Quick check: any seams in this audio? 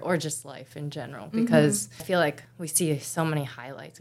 yes; 1 cut; at 2.0 s

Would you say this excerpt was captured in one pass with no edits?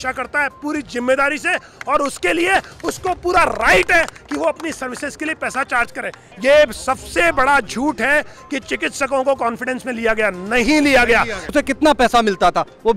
no; 2 cuts; at 6.3 s, 11.4 s

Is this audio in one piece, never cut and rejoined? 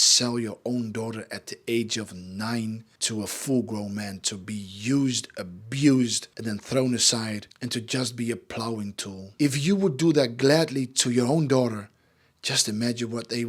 no; 3 cuts; at 2.9 s, 6.3 s, 9.2 s

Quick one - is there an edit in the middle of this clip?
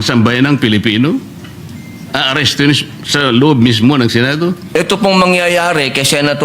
yes; 1 cut; at 4.6 s

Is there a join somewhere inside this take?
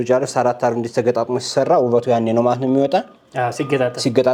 no; 0 cuts

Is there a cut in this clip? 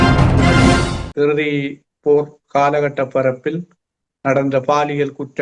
yes; 1 cut; at 1.0 s

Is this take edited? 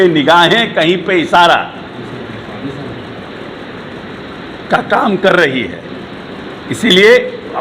no; 0 cuts

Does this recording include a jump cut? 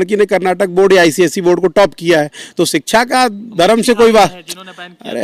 no; 0 cuts

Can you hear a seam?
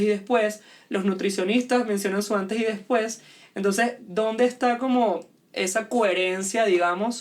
no; 0 cuts

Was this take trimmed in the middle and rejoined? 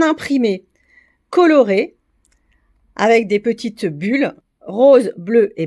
yes; 1 cut; at 4.4 s

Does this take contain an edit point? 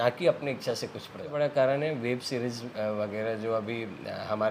yes; 1 cut; at 1.2 s

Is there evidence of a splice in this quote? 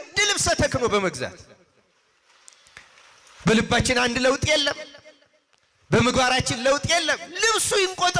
no; 0 cuts

